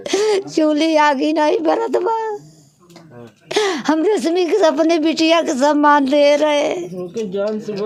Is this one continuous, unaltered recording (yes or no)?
yes